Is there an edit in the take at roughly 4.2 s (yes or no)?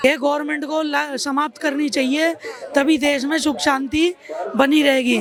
no